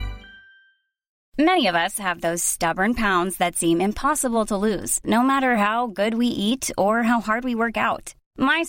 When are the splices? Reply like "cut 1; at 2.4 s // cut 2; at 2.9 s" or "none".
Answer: cut 1; at 1.2 s